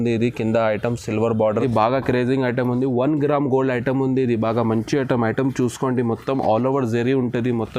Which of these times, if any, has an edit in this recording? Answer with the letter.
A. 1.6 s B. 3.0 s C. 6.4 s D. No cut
A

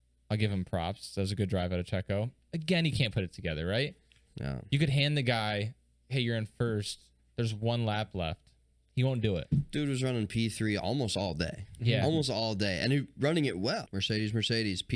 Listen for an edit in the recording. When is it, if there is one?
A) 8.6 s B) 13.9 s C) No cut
B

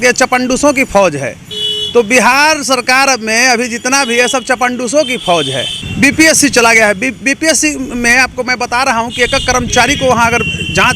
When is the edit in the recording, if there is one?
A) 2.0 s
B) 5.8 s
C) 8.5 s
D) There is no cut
B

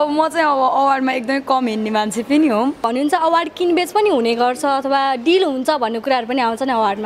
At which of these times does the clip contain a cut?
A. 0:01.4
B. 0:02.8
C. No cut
B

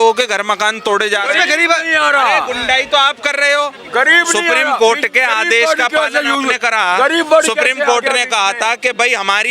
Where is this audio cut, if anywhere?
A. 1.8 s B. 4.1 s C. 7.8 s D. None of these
D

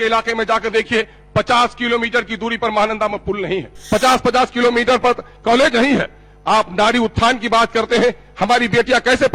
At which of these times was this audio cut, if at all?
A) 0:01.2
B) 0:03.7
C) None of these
B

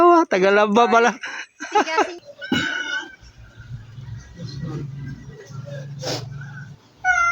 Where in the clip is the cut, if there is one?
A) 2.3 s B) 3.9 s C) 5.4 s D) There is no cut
A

